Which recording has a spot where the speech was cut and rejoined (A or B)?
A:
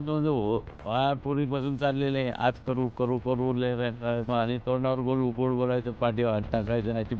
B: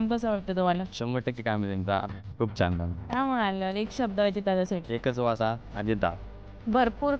B